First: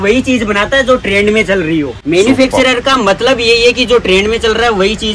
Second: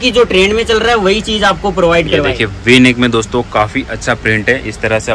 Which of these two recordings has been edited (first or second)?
first